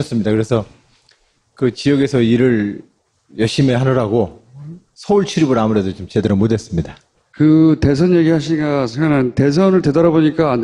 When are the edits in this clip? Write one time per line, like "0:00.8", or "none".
none